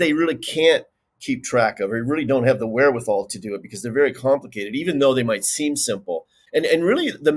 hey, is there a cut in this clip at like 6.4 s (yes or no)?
yes